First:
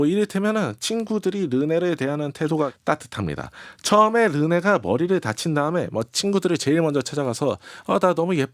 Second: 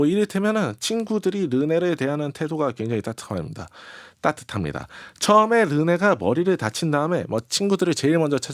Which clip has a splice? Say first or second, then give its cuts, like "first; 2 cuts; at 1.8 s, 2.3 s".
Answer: first; 1 cut; at 2.8 s